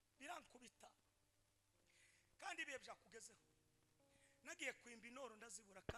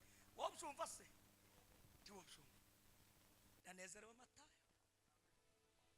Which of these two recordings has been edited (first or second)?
second